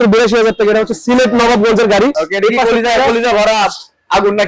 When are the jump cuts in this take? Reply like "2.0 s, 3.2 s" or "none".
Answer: 2.2 s